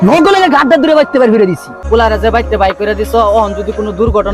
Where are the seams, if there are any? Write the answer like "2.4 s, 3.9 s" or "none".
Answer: 1.7 s

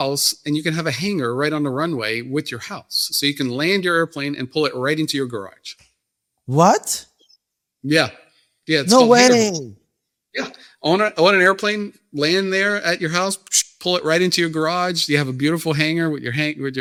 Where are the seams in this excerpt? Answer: none

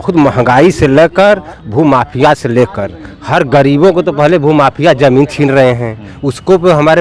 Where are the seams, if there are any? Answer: none

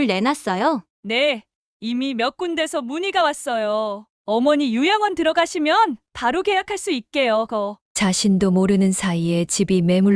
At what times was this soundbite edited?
0.9 s, 7.8 s

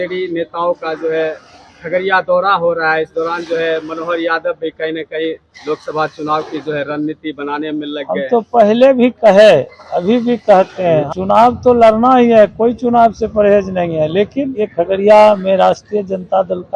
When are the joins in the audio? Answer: 11.0 s, 14.7 s

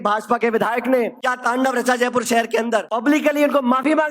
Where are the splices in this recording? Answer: 1.3 s, 2.9 s

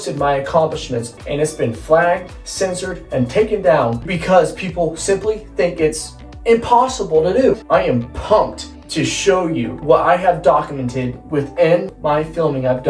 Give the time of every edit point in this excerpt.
1.0 s, 4.1 s, 7.6 s, 9.8 s, 11.9 s

